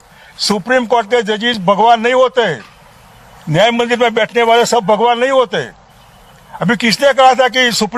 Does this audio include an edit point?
no; 0 cuts

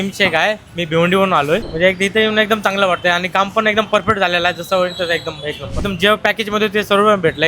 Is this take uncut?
no; 2 cuts; at 1.6 s, 5.8 s

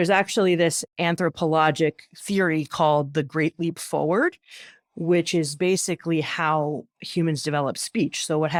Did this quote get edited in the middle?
no; 0 cuts

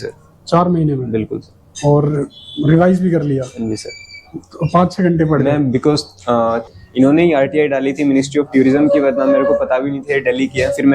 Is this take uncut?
no; 1 cut; at 6.6 s

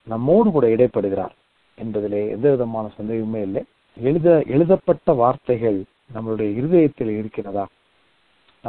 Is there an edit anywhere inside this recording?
yes; 1 cut; at 3.8 s

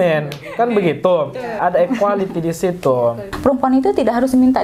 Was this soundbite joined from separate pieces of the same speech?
yes; 2 cuts; at 1.6 s, 3.3 s

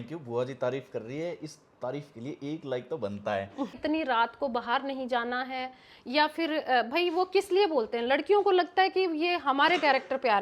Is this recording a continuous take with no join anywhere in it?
no; 1 cut; at 3.8 s

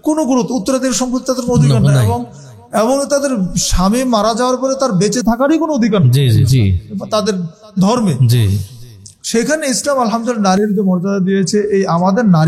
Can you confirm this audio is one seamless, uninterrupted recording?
yes; 0 cuts

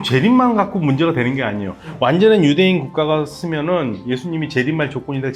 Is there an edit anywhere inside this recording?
no; 0 cuts

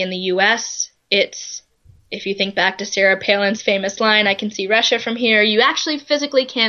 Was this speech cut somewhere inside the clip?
no; 0 cuts

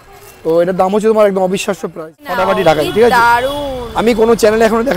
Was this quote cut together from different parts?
yes; 1 cut; at 2.3 s

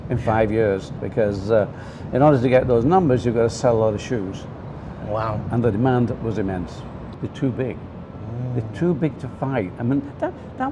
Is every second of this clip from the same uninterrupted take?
no; 2 cuts; at 1.0 s, 7.1 s

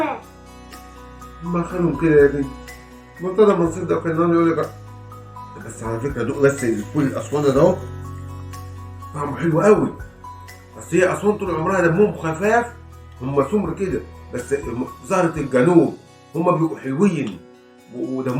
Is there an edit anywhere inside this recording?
no; 0 cuts

